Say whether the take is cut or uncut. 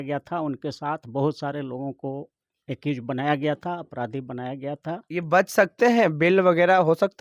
cut